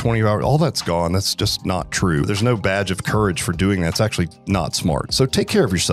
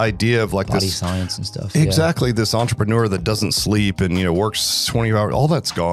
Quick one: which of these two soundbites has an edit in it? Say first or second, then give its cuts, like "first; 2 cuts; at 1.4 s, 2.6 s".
first; 2 cuts; at 2.3 s, 5.1 s